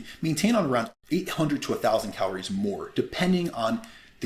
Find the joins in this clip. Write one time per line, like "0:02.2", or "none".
0:00.9